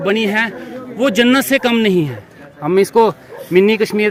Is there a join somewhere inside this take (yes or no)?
no